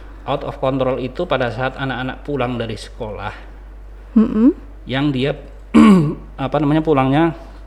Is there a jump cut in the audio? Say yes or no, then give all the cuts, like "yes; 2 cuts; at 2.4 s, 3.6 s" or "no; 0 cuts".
no; 0 cuts